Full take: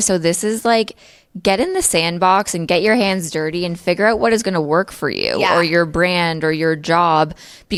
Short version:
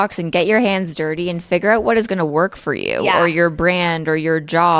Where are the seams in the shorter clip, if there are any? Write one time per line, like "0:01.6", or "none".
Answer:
none